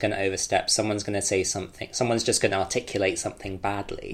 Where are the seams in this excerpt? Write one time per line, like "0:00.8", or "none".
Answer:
none

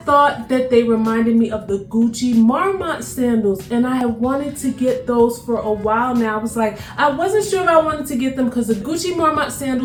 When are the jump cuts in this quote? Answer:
none

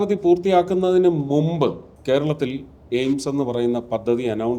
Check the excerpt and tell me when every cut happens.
0:01.9

